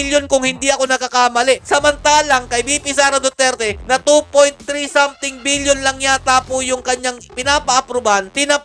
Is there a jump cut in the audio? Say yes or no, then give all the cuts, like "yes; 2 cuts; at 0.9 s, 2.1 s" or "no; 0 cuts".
no; 0 cuts